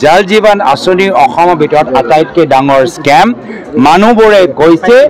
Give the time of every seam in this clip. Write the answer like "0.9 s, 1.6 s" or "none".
none